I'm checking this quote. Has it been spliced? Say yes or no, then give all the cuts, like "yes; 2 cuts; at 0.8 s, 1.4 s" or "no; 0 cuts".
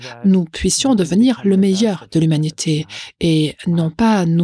no; 0 cuts